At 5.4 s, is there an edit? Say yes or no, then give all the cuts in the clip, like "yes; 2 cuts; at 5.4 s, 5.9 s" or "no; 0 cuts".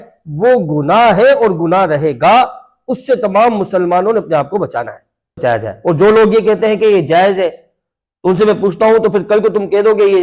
yes; 1 cut; at 5.4 s